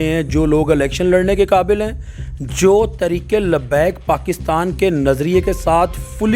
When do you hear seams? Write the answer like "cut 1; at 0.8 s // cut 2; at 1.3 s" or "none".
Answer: none